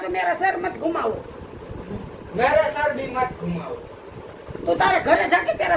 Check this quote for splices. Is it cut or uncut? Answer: uncut